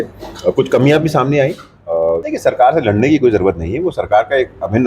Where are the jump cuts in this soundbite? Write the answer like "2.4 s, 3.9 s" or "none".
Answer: 2.2 s